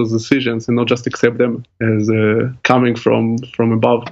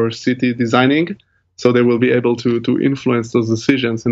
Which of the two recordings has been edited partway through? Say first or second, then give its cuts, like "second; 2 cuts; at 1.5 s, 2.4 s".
first; 2 cuts; at 1.7 s, 2.5 s